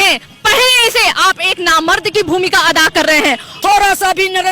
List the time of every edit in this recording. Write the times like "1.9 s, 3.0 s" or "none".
3.5 s

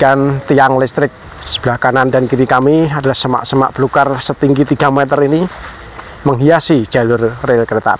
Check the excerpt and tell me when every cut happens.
1.2 s

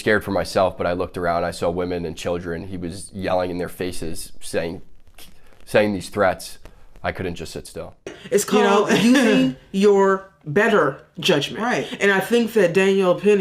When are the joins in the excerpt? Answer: 8.2 s

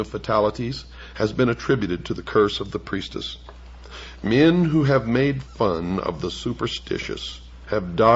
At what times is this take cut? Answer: none

